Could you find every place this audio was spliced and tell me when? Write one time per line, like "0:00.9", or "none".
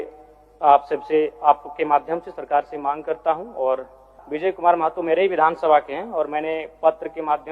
0:04.2